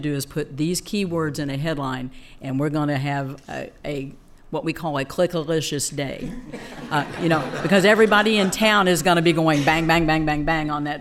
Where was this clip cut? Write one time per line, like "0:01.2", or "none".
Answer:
none